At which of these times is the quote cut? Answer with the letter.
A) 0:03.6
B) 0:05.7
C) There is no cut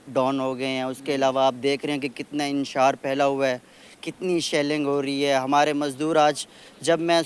C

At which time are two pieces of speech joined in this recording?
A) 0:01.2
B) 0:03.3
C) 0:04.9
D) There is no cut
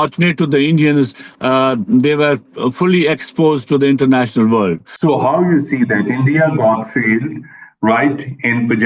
C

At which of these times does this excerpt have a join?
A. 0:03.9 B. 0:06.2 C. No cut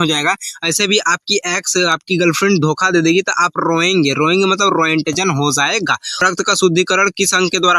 B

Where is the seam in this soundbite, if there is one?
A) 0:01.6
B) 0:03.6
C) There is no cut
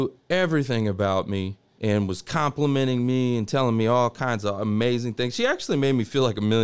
A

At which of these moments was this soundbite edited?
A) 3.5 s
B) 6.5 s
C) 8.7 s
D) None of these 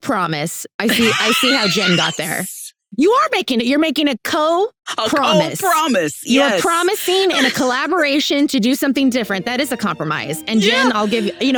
D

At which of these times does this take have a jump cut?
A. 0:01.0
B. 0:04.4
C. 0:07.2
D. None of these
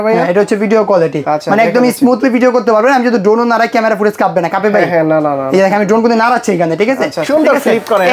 C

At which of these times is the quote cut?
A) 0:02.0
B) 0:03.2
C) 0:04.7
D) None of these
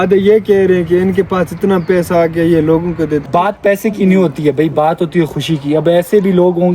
B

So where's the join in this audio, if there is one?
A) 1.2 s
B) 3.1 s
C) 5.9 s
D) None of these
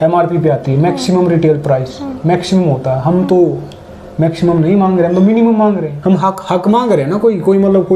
C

